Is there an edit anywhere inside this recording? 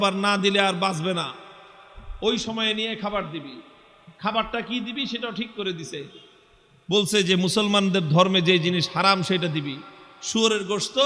no; 0 cuts

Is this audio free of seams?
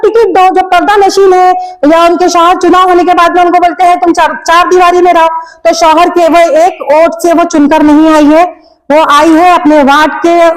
yes; 0 cuts

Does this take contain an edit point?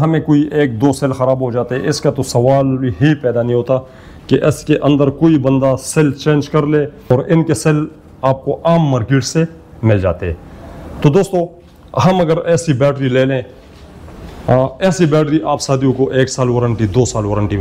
yes; 1 cut; at 7.1 s

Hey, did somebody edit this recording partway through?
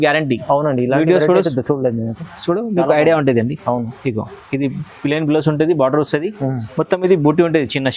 no; 0 cuts

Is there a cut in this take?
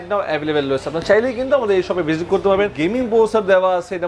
yes; 1 cut; at 2.7 s

